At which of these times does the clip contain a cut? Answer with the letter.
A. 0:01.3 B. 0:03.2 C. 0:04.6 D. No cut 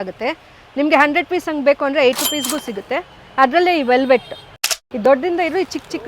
C